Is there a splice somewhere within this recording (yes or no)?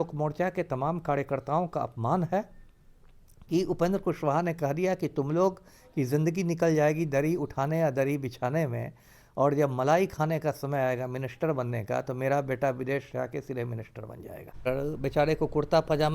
yes